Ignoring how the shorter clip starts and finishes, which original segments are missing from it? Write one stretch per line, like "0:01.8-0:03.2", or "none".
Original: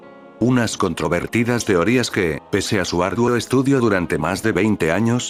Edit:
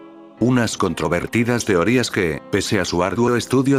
none